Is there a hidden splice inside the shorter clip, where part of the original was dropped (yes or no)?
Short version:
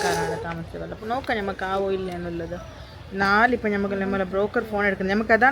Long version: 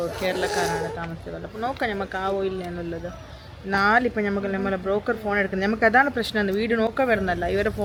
no